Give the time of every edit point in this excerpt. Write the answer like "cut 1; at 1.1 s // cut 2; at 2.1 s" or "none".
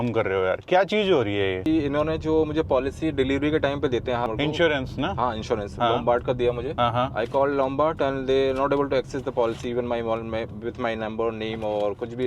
cut 1; at 1.7 s // cut 2; at 4.3 s // cut 3; at 6.7 s